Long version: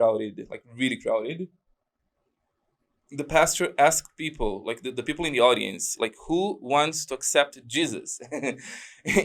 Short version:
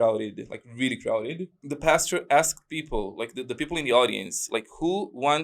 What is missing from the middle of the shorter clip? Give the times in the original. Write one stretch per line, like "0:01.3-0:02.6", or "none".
0:01.6-0:03.0